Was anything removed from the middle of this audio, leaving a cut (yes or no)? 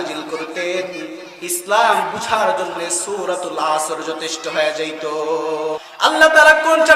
yes